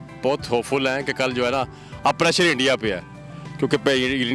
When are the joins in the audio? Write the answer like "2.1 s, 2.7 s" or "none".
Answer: none